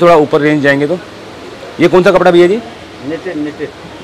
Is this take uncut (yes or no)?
yes